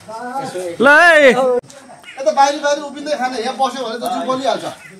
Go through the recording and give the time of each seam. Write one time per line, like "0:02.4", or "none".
0:01.6